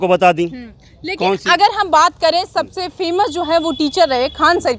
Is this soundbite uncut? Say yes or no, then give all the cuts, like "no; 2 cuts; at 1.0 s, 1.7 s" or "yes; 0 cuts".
yes; 0 cuts